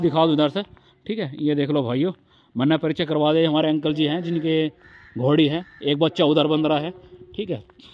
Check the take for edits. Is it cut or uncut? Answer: uncut